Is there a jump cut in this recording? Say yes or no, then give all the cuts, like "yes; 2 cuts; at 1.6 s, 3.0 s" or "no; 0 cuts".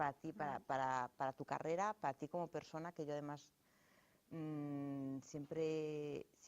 yes; 1 cut; at 5.2 s